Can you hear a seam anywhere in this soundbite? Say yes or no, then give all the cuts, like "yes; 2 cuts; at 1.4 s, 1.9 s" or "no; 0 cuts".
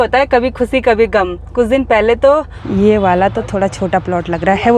yes; 1 cut; at 2.6 s